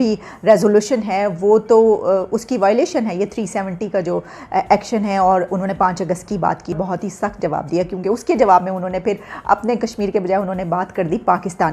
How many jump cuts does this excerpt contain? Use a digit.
1